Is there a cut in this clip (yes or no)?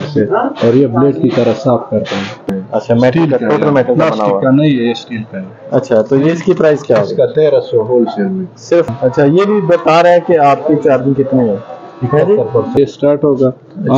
yes